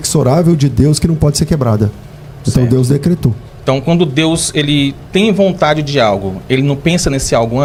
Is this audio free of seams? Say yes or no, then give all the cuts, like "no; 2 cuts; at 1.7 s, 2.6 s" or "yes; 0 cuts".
yes; 0 cuts